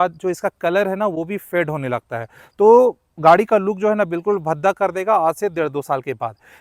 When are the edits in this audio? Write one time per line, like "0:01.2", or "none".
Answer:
none